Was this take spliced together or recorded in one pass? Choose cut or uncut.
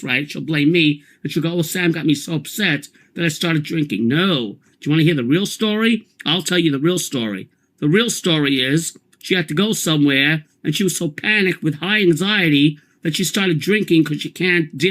cut